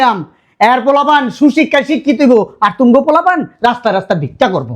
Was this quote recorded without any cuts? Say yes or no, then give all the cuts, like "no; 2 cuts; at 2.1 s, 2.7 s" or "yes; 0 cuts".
yes; 0 cuts